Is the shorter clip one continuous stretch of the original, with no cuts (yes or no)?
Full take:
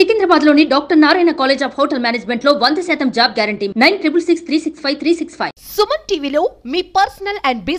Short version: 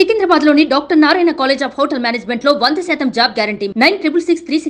yes